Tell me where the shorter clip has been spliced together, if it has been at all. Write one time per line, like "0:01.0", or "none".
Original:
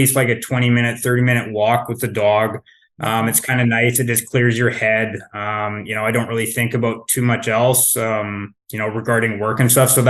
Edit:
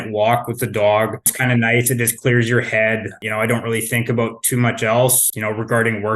0:01.3
0:03.2
0:05.2